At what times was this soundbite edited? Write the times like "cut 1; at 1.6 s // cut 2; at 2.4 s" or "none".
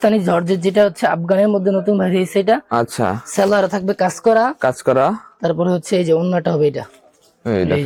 none